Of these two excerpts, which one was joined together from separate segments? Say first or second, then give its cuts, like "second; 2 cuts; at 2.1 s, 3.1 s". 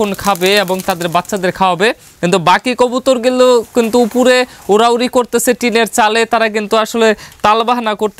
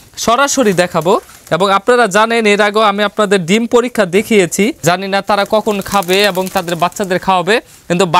second; 1 cut; at 4.8 s